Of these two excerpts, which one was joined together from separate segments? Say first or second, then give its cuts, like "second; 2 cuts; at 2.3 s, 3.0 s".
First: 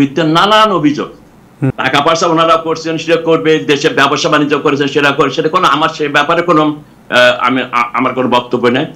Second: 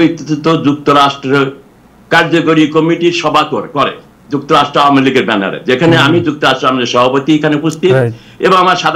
first; 1 cut; at 1.8 s